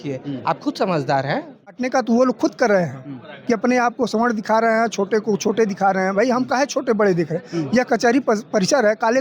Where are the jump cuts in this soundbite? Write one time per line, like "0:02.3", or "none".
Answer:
0:01.7